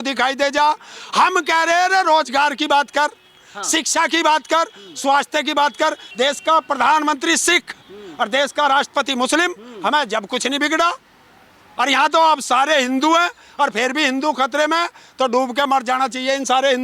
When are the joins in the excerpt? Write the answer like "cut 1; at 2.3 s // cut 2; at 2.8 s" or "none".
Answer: cut 1; at 6.0 s